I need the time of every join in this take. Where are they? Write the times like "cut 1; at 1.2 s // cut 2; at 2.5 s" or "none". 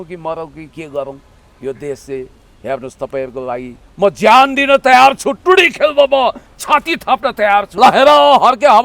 cut 1; at 7.7 s